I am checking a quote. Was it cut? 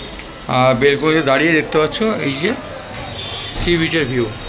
no; 0 cuts

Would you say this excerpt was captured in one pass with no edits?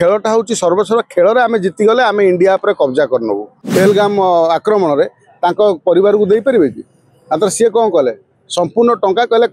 no; 1 cut; at 3.5 s

